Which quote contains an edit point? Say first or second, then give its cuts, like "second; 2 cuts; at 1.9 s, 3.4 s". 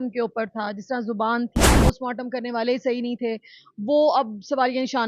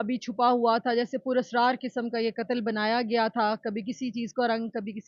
first; 1 cut; at 1.8 s